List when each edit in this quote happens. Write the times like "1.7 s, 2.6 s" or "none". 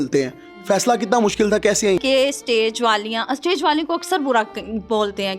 2.0 s

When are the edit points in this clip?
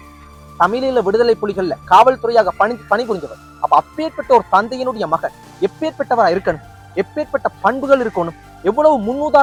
none

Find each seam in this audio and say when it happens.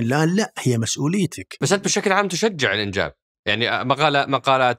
1.6 s

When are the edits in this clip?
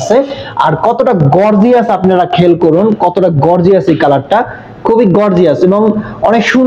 none

